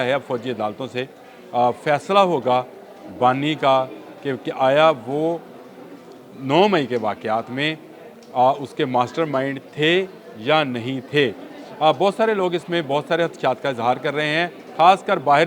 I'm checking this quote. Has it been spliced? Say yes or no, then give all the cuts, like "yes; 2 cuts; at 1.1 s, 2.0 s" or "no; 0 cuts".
no; 0 cuts